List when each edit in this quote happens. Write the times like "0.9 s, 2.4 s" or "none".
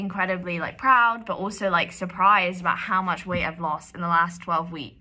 none